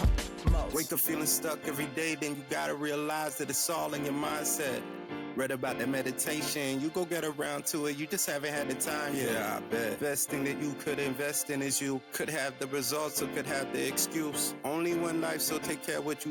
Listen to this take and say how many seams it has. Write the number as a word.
zero